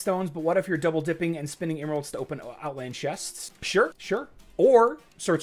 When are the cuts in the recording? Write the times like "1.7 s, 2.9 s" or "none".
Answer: none